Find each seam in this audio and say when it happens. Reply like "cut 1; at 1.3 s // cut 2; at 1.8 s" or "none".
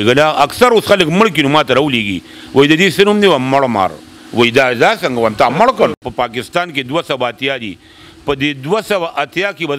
cut 1; at 6.0 s